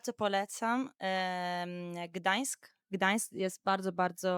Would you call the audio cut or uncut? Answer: uncut